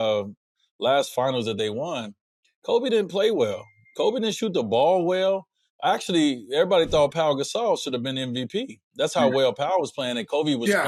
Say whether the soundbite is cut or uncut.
uncut